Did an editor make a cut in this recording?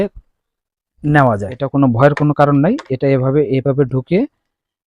yes; 1 cut; at 1.6 s

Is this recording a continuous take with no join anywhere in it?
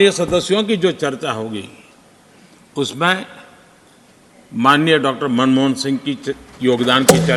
yes; 0 cuts

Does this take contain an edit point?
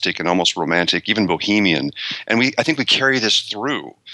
no; 0 cuts

